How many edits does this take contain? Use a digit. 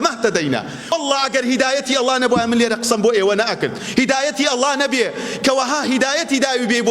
1